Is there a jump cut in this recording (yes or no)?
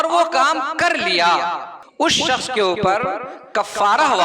yes